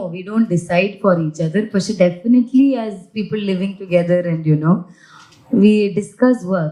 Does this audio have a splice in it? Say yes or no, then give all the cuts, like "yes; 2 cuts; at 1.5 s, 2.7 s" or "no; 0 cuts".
no; 0 cuts